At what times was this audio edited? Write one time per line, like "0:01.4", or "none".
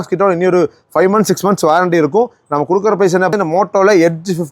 0:03.3

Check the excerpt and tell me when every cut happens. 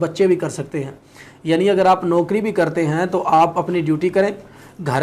none

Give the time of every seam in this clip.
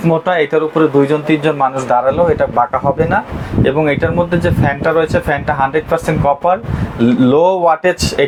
none

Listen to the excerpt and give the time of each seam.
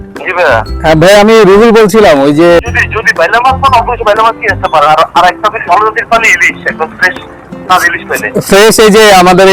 0:02.6

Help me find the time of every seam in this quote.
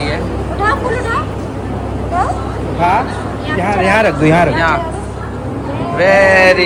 none

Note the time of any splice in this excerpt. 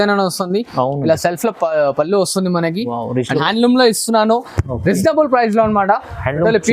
0:03.4

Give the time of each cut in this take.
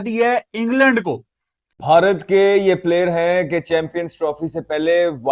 0:01.8

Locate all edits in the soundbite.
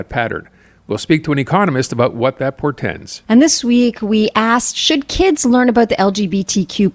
0:03.1

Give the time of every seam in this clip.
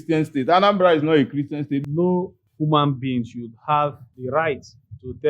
0:01.8

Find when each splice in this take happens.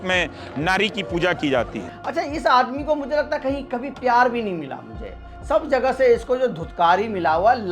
0:01.9

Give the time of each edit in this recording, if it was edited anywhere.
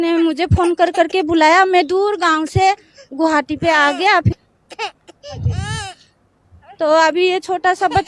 0:04.4

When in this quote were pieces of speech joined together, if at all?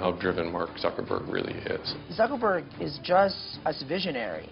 0:01.9
0:03.5

